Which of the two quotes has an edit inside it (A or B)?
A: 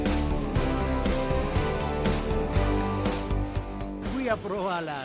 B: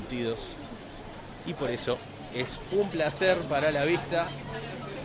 A